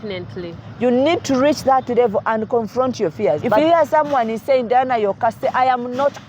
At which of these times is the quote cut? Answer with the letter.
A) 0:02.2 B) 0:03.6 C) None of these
B